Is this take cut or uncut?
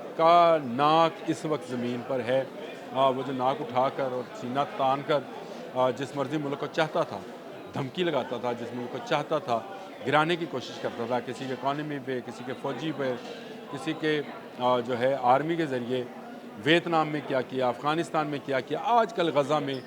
uncut